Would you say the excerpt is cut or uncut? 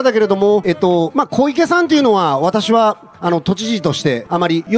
uncut